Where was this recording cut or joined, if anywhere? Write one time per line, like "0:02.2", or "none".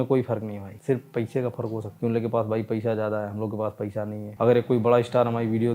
0:04.3